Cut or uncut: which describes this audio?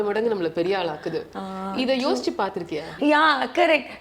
uncut